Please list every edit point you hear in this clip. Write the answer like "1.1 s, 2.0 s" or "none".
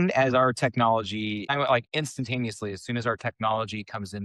1.5 s